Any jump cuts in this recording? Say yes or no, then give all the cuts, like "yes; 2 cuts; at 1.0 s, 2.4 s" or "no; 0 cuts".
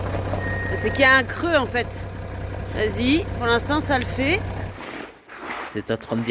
yes; 1 cut; at 4.6 s